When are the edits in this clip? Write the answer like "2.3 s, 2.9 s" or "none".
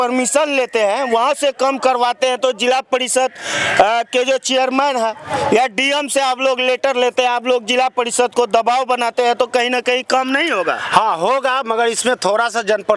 none